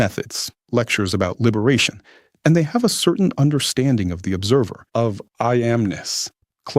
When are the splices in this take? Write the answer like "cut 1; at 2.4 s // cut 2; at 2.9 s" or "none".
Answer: cut 1; at 4.8 s